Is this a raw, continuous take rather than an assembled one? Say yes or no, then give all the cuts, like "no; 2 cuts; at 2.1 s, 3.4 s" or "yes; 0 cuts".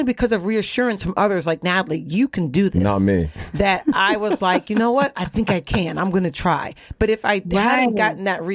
yes; 0 cuts